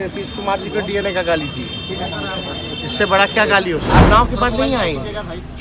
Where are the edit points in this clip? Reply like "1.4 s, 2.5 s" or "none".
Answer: 4.1 s